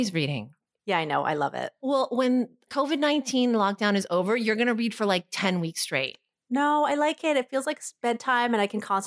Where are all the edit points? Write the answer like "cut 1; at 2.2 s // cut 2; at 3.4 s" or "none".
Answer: cut 1; at 2.7 s